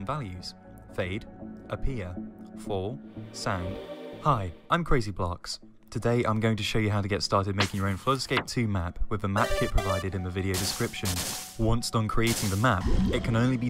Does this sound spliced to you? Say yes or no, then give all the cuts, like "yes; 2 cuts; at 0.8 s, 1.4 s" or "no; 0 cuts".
yes; 1 cut; at 4.1 s